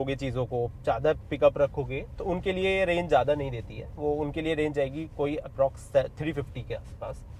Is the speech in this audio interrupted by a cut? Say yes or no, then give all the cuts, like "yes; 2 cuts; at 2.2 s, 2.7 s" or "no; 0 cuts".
no; 0 cuts